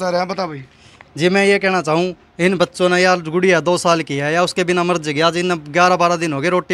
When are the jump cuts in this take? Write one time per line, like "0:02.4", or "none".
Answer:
none